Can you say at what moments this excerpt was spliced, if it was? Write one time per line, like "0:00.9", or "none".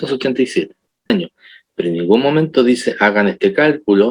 0:01.1